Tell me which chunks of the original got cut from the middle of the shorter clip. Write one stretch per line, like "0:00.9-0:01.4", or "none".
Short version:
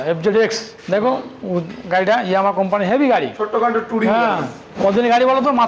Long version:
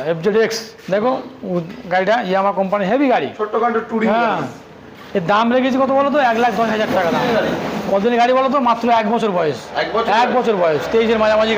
0:04.7-0:07.7